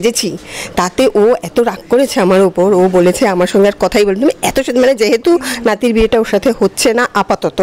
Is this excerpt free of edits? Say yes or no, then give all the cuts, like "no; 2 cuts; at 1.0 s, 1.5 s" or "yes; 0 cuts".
yes; 0 cuts